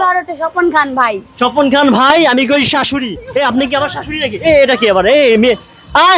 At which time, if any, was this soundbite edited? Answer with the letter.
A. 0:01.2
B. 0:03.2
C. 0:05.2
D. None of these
B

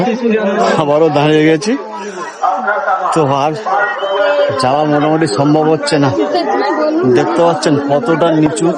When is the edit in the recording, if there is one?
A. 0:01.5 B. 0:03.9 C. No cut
C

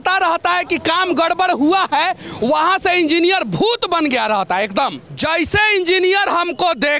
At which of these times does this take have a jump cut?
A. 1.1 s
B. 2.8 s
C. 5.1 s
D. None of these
C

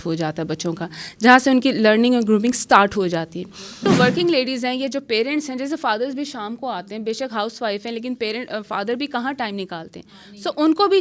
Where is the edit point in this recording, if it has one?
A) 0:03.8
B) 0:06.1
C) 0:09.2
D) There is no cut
A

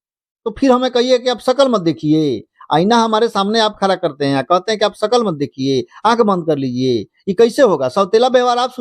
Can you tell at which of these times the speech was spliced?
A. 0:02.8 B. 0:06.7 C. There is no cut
C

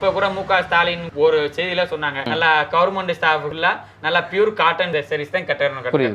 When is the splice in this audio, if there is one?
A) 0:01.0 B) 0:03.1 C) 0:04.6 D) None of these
D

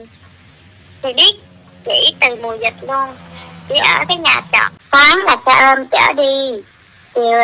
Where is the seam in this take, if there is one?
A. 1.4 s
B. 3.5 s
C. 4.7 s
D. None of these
C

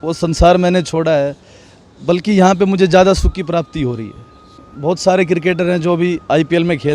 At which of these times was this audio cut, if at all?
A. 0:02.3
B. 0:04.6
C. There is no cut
B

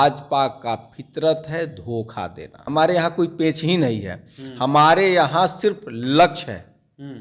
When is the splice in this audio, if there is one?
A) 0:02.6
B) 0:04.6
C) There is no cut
A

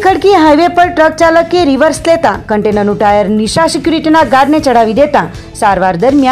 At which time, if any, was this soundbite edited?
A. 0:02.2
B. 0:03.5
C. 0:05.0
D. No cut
D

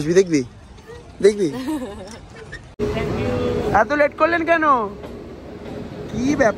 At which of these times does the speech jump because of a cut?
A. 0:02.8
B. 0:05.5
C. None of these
A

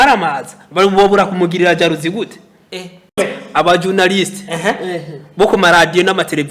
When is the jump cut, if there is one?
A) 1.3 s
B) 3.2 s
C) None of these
B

